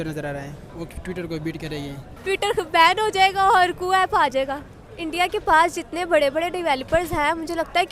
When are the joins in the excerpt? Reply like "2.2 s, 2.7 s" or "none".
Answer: 2.1 s, 4.8 s